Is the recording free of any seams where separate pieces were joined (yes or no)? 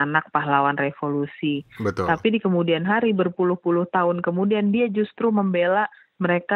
yes